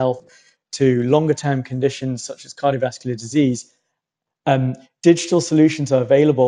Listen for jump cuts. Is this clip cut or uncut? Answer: uncut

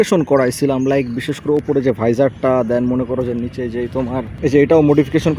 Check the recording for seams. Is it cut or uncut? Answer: cut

